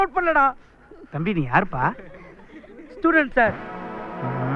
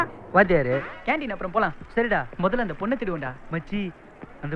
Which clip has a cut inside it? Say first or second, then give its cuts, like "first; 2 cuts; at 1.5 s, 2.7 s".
second; 1 cut; at 1.0 s